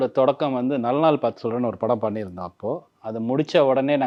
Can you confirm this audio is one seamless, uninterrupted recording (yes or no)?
yes